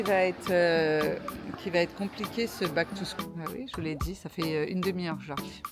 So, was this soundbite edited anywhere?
yes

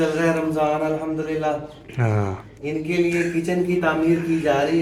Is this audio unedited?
yes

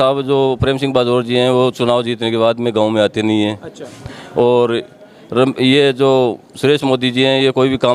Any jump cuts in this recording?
no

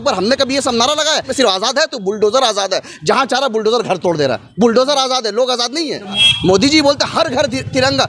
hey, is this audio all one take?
no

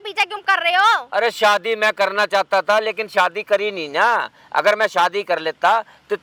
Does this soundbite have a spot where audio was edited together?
no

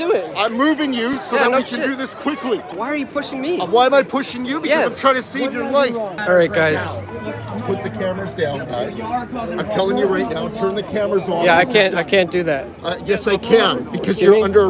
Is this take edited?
yes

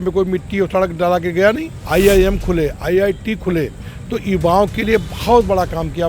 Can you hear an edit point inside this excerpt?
yes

